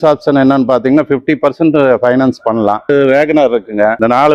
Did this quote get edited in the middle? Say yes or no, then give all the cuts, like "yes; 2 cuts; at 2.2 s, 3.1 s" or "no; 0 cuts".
no; 0 cuts